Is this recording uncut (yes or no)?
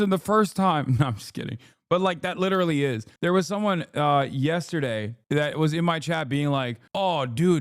no